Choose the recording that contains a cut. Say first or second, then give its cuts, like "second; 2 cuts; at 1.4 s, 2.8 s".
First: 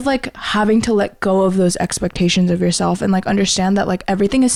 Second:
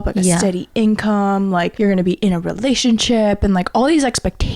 second; 1 cut; at 1.7 s